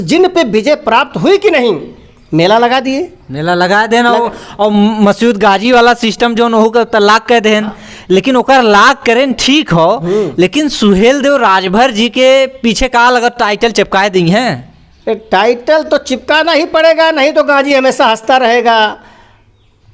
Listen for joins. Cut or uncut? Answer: uncut